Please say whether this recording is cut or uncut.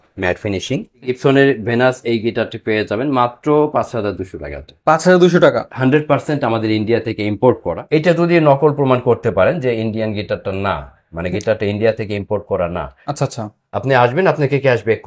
cut